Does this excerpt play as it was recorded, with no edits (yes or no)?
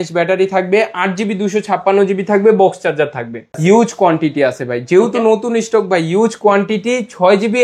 no